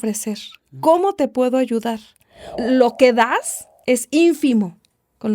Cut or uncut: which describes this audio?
cut